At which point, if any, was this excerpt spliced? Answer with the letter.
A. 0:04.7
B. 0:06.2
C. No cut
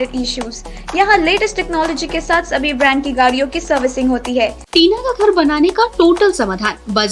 A